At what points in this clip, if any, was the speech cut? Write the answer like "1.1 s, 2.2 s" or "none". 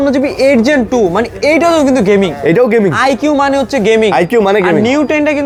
none